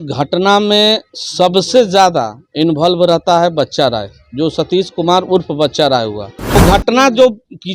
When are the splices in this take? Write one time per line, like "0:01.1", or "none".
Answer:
0:06.6